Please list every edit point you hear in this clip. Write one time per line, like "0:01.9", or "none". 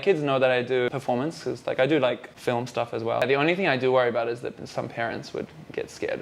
0:00.9
0:03.2